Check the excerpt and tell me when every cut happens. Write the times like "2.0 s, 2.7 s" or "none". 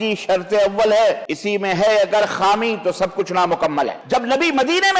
1.3 s, 4.0 s

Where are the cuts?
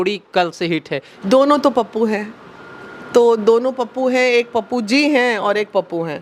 none

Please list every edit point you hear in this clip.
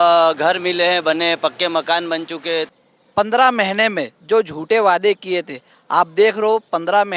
2.8 s

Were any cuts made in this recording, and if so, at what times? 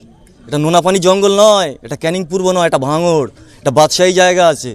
none

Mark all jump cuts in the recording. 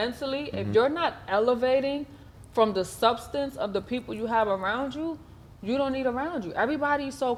none

